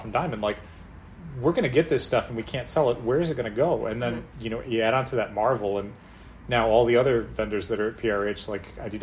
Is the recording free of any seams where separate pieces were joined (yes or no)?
yes